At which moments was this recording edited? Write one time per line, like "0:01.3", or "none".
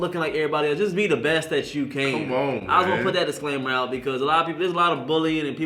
none